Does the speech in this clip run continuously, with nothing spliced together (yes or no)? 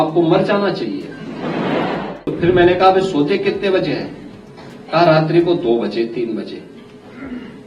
no